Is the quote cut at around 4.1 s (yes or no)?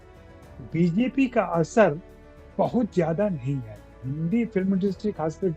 yes